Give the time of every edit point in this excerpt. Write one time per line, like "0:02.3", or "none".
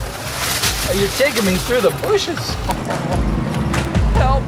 none